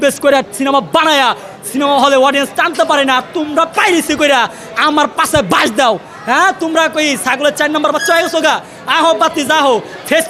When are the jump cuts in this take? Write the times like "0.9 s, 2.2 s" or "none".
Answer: none